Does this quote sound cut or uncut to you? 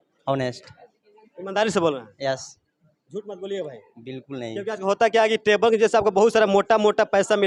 uncut